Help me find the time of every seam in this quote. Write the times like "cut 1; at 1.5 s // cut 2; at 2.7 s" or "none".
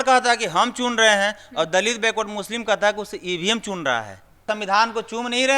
cut 1; at 4.5 s